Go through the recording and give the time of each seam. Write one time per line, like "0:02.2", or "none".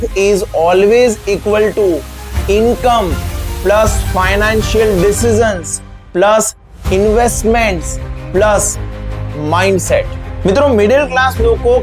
0:10.2